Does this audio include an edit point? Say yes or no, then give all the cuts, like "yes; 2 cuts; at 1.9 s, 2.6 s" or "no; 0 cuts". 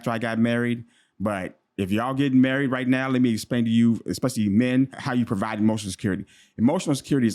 yes; 1 cut; at 5.0 s